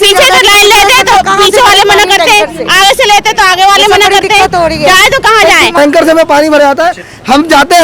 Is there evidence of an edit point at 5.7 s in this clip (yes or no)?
yes